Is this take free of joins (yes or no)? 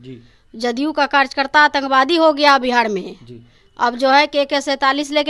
yes